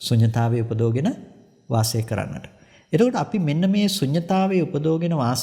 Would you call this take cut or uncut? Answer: uncut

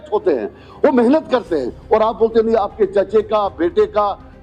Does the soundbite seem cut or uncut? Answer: uncut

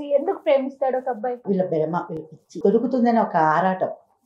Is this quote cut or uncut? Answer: cut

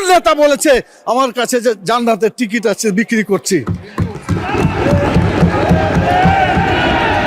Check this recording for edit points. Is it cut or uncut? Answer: uncut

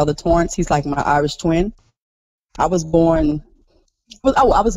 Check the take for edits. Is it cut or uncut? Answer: uncut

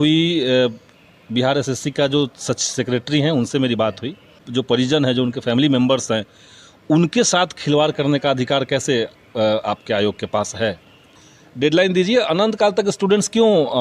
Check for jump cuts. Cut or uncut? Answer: cut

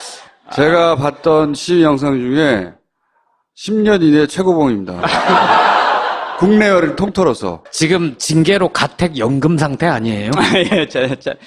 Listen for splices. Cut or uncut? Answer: cut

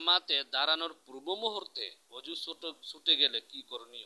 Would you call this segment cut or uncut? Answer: uncut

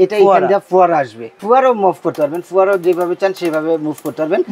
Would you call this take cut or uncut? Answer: cut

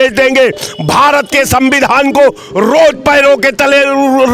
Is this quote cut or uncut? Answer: uncut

